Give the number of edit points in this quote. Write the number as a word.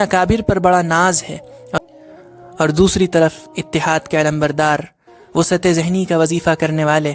one